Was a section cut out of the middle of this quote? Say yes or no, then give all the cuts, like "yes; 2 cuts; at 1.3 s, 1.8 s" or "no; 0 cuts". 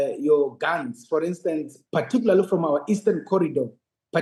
no; 0 cuts